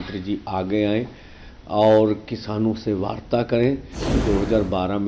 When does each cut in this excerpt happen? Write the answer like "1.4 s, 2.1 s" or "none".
4.1 s